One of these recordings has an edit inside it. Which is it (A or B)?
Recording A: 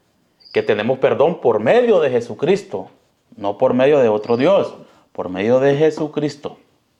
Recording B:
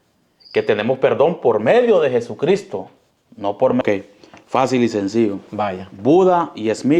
B